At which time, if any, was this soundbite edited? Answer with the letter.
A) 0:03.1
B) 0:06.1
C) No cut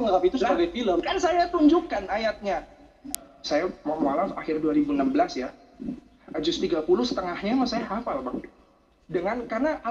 A